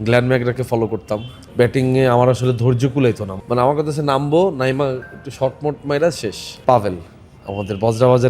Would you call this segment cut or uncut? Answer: cut